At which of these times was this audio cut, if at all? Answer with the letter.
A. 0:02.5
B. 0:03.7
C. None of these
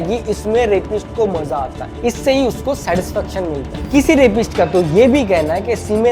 B